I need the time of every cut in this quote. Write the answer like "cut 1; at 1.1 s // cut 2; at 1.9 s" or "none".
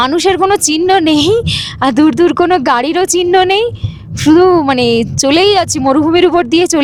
none